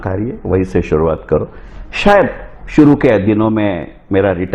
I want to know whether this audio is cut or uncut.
uncut